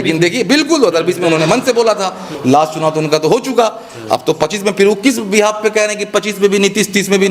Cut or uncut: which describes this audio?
cut